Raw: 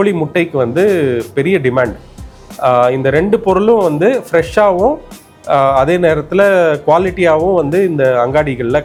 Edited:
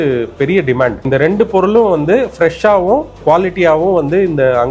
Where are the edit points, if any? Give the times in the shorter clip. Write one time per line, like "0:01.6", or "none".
0:01.0
0:03.2